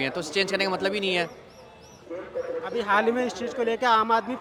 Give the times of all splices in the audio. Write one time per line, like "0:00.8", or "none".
none